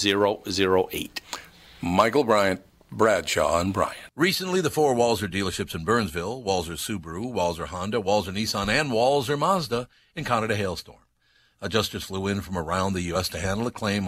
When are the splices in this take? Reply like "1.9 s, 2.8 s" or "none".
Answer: 4.0 s